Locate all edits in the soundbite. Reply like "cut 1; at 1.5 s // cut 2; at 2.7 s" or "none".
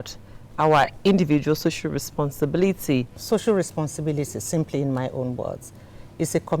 cut 1; at 3.2 s